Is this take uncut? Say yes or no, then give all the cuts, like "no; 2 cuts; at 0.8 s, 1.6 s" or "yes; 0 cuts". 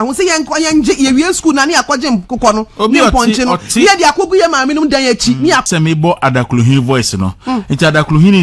no; 1 cut; at 5.6 s